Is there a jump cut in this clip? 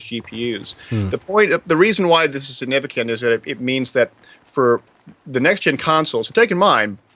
no; 0 cuts

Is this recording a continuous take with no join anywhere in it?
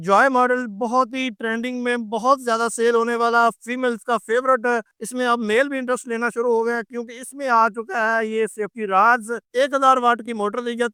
yes; 0 cuts

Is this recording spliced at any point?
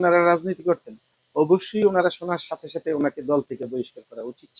no; 0 cuts

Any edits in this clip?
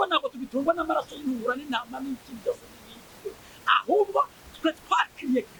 no; 0 cuts

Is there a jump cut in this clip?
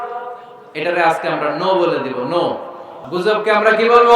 yes; 1 cut; at 3.0 s

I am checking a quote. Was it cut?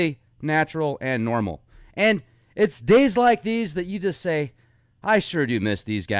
no; 0 cuts

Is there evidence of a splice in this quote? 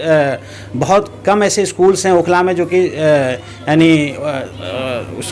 no; 0 cuts

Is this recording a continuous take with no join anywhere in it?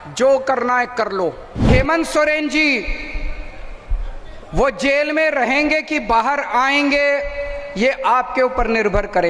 no; 1 cut; at 1.7 s

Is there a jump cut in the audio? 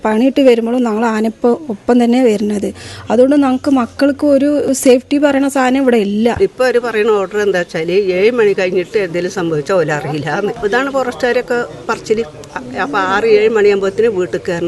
yes; 3 cuts; at 6.4 s, 10.6 s, 12.5 s

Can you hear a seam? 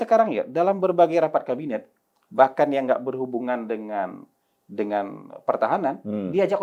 no; 0 cuts

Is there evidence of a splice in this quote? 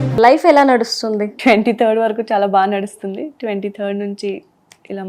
yes; 1 cut; at 1.3 s

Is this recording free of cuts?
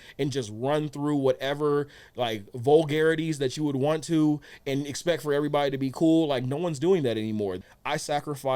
no; 1 cut; at 7.6 s

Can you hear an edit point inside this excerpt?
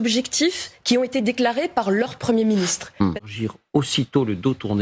yes; 1 cut; at 3.2 s

